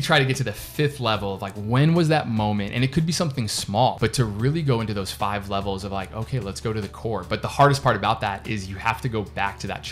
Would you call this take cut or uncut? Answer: cut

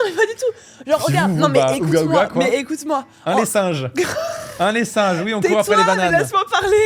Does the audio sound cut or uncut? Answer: uncut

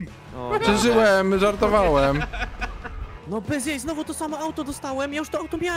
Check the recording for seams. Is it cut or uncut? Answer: cut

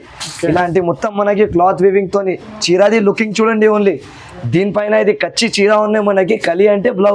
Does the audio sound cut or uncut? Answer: uncut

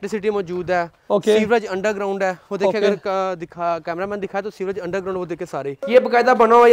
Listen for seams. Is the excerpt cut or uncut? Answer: cut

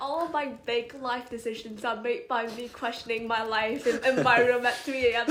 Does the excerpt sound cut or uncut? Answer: uncut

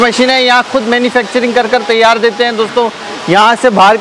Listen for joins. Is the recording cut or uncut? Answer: uncut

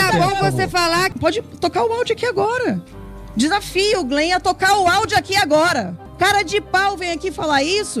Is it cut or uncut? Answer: cut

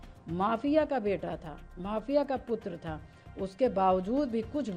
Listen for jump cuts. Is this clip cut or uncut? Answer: uncut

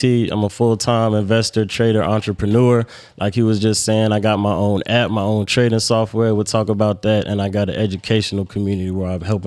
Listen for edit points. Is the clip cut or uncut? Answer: uncut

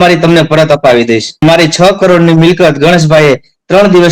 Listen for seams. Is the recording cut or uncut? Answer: cut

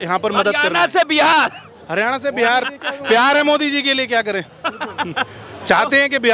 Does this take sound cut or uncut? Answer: uncut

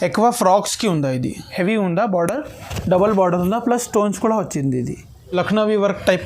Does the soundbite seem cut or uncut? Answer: cut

